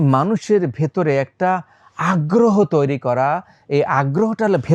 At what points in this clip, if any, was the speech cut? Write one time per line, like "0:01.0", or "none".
none